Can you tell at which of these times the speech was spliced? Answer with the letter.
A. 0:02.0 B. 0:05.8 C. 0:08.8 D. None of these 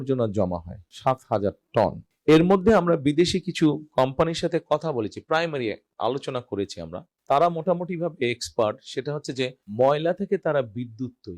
A